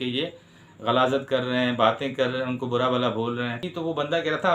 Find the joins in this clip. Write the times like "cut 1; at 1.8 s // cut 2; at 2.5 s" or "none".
cut 1; at 3.6 s